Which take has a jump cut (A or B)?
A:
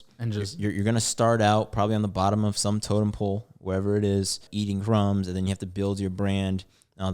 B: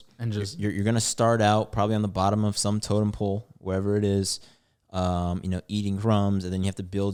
A